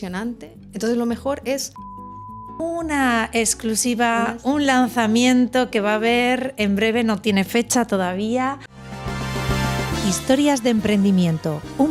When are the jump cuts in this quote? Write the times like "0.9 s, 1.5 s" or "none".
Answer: 2.4 s, 8.7 s